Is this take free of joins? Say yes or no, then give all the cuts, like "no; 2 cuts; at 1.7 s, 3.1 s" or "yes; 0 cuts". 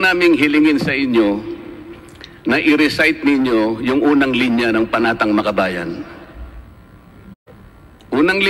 no; 1 cut; at 7.4 s